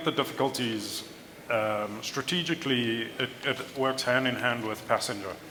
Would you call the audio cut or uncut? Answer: uncut